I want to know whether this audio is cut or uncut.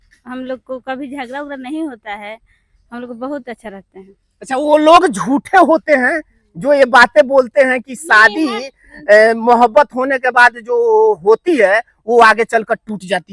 uncut